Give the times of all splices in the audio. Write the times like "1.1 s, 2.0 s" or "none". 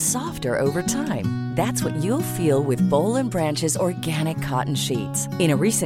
none

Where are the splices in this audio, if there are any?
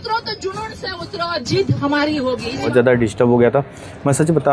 2.6 s

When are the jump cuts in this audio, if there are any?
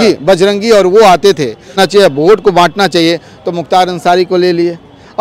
1.8 s

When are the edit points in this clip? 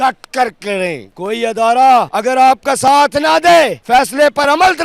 1.1 s, 2.1 s, 3.8 s

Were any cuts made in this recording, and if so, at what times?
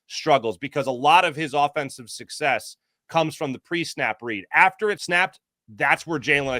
5.0 s

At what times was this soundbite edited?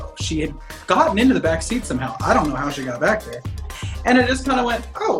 3.8 s

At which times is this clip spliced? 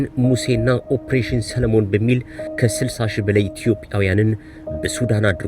2.4 s

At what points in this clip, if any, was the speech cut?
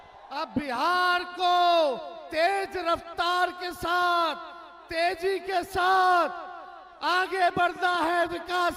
none

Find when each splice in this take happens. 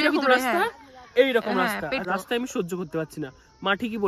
2.0 s

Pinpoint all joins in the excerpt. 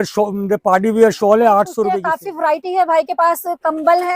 2.0 s

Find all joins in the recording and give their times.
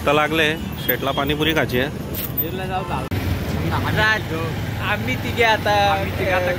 3.1 s

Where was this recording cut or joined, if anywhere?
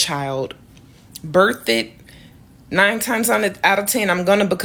none

